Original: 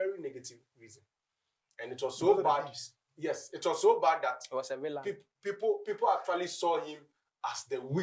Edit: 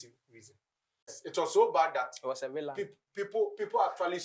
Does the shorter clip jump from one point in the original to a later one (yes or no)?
yes